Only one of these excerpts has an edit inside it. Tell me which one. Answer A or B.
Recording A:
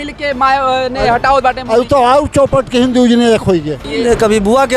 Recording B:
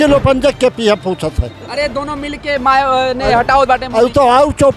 A